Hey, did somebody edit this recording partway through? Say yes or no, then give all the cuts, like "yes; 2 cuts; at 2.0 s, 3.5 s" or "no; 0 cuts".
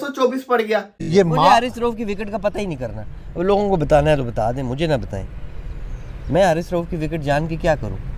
yes; 1 cut; at 1.0 s